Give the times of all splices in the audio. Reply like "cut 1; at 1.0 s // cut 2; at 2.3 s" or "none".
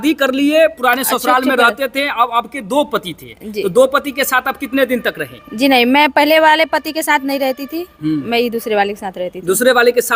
none